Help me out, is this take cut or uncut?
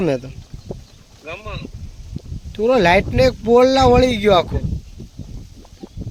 uncut